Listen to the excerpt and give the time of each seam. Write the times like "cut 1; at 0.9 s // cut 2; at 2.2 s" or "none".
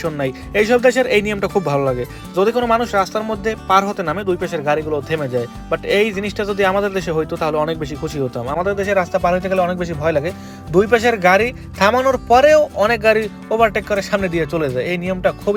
none